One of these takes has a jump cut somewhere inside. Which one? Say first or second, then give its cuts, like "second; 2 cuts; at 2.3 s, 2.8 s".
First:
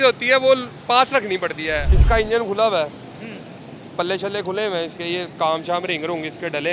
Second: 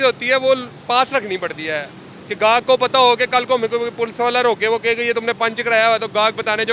first; 1 cut; at 1.9 s